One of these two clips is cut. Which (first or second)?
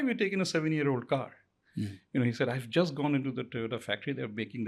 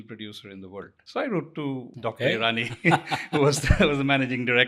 second